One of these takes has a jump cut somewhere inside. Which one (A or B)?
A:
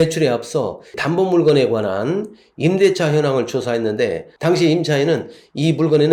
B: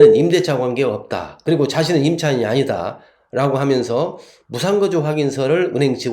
B